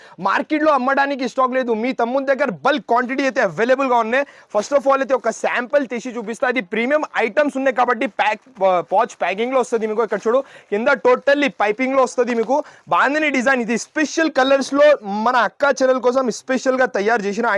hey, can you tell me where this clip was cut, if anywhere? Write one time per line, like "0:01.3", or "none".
none